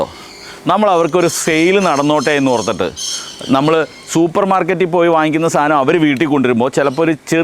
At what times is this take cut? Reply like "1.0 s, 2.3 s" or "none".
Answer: none